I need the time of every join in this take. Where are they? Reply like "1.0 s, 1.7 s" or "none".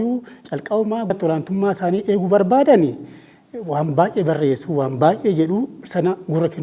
1.1 s